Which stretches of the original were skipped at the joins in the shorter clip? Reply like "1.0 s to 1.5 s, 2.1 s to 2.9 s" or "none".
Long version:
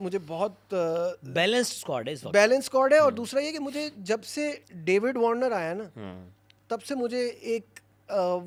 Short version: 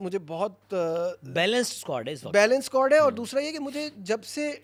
none

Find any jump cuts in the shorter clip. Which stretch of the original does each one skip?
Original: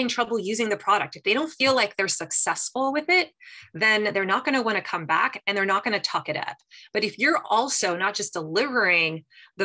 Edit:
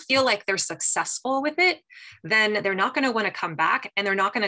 none

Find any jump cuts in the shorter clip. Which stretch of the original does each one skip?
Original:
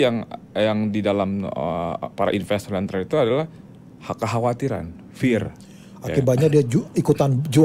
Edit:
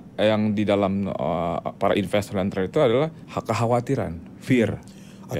3.6 s to 4.0 s

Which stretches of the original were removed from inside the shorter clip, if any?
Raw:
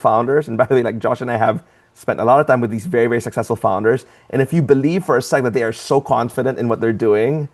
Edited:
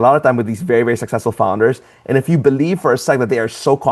none

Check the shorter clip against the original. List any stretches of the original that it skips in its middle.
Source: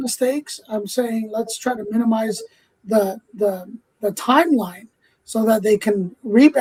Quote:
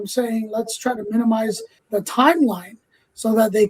2.5 s to 3.8 s

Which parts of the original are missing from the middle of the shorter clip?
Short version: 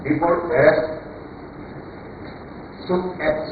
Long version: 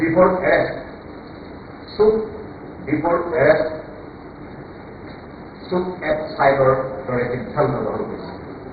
none

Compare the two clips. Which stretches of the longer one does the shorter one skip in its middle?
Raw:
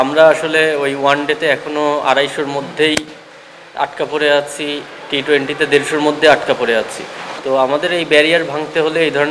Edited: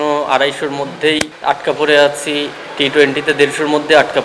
3.1 s to 3.6 s

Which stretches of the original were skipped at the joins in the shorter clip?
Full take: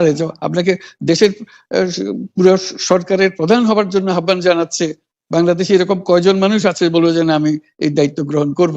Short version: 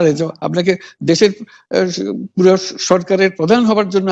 none

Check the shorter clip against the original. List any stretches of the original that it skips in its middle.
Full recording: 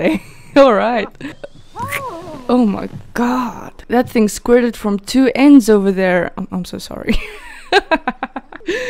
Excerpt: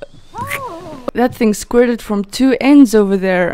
2.3 s to 3.7 s

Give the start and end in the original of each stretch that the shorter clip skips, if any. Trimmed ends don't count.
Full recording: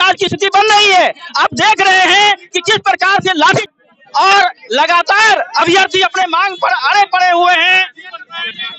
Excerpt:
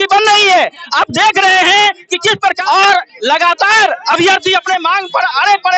3.0 s to 4.1 s

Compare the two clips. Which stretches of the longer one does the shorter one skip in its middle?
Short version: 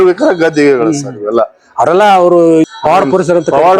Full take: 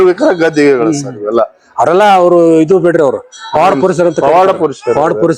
2.7 s to 3.4 s

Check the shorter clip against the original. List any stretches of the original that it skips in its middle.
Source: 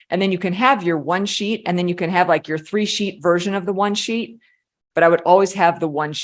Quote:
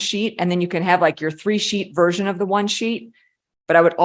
none

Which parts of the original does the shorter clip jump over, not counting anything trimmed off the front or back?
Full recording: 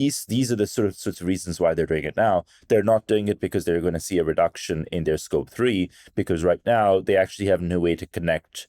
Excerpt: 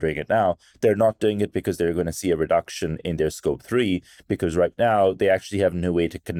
none

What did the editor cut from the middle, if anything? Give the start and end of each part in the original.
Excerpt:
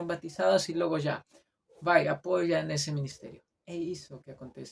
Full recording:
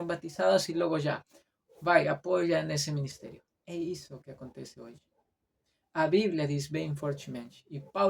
none

